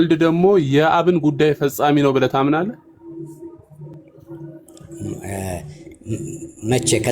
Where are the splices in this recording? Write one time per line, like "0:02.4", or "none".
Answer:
none